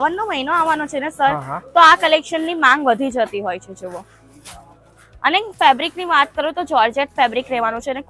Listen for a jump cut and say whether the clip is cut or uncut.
uncut